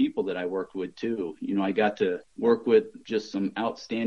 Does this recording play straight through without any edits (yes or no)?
no